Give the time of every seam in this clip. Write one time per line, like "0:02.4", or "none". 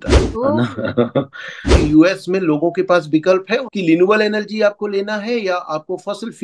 0:01.7
0:03.7